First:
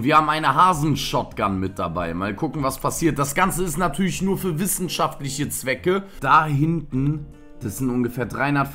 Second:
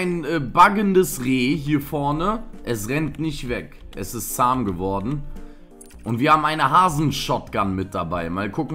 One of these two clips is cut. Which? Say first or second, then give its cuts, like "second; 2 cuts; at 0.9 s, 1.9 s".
first; 1 cut; at 6.1 s